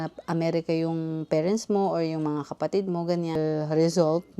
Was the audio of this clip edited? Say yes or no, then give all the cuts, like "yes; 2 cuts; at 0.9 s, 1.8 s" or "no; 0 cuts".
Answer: yes; 1 cut; at 3.4 s